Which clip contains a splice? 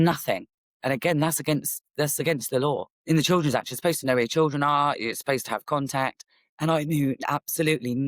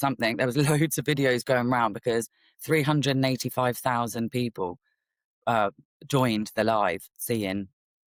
first; 1 cut; at 2.9 s

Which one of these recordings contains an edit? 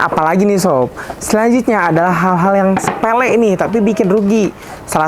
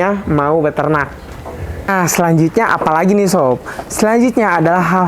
second; 1 cut; at 1.2 s

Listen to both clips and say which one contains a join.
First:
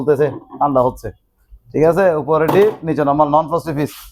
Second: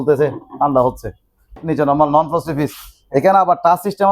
second; 1 cut; at 1.6 s

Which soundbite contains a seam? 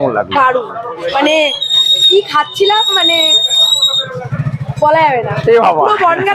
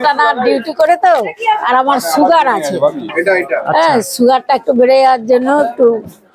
second; 1 cut; at 1.6 s

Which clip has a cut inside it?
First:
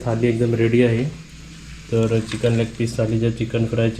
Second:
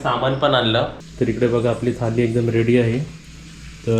second; 1 cut; at 1.0 s

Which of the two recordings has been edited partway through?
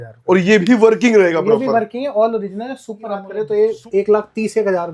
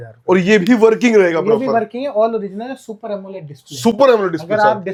first; 1 cut; at 3.3 s

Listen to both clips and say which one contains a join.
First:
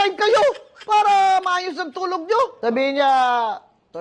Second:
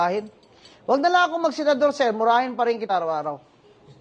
first; 1 cut; at 2.5 s

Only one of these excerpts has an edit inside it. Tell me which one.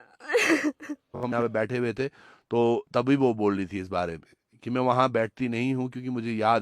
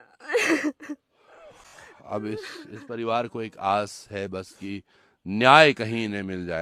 first; 1 cut; at 1.3 s

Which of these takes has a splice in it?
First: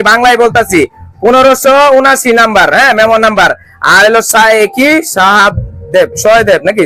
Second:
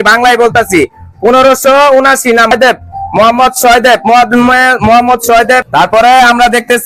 second; 2 cuts; at 2.5 s, 5.7 s

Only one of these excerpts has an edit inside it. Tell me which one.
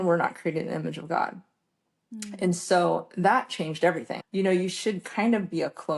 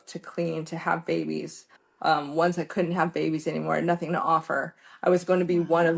first; 1 cut; at 4.1 s

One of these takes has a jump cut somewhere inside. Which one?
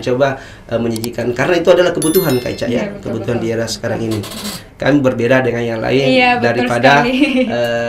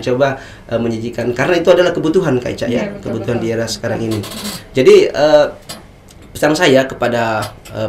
first; 1 cut; at 4.6 s

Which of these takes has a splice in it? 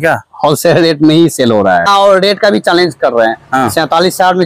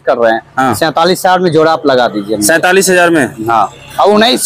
first; 1 cut; at 1.9 s

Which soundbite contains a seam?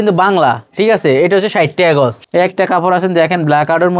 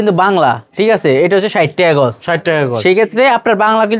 first; 1 cut; at 2.2 s

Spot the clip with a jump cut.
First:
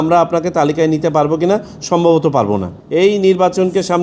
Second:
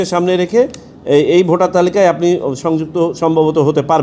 first; 1 cut; at 2.8 s

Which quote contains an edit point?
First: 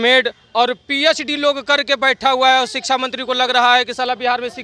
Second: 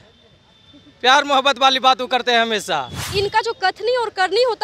second; 1 cut; at 3.1 s

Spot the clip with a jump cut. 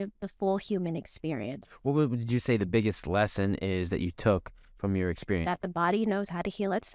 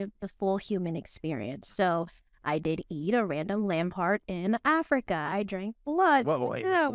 first; 2 cuts; at 1.6 s, 5.4 s

